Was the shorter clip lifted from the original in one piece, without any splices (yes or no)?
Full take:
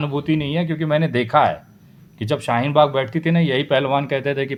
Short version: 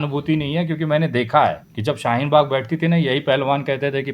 no